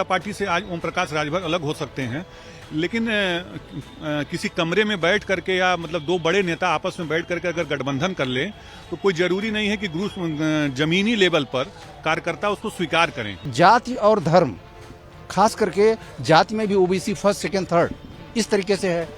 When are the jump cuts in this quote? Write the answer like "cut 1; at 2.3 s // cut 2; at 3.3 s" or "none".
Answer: cut 1; at 13.5 s